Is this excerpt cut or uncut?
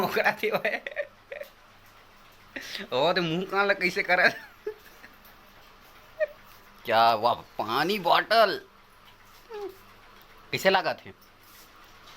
cut